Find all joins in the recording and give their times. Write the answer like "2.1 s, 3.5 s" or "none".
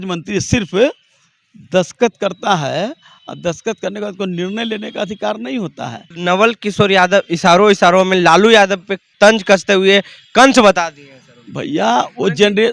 6.0 s, 9.1 s